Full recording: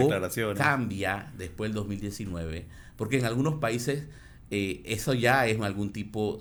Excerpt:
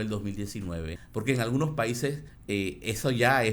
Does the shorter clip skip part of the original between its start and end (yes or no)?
yes